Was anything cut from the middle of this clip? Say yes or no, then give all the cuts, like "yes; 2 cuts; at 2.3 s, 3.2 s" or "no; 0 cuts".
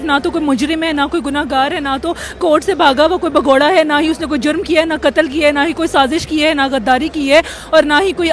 no; 0 cuts